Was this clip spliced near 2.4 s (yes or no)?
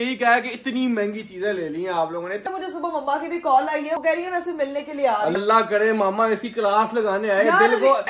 yes